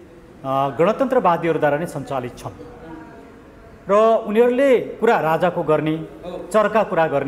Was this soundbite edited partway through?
no; 0 cuts

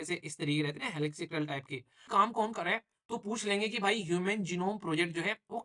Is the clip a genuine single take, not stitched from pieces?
no; 1 cut; at 2.1 s

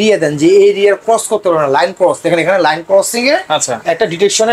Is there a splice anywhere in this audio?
no; 0 cuts

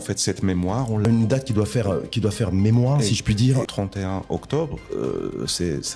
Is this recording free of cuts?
no; 2 cuts; at 1.1 s, 3.7 s

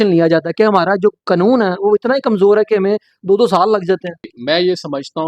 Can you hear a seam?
yes; 1 cut; at 4.3 s

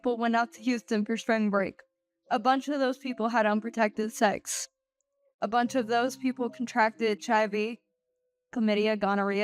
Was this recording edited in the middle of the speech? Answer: no; 0 cuts

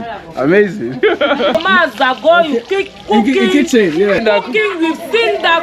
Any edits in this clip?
yes; 2 cuts; at 1.5 s, 4.2 s

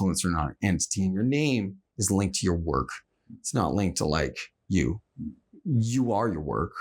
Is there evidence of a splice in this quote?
yes; 1 cut; at 4.5 s

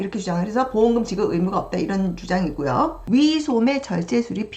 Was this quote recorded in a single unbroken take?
no; 1 cut; at 3.0 s

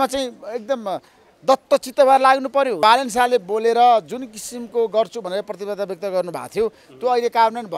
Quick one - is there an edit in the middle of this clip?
yes; 1 cut; at 2.8 s

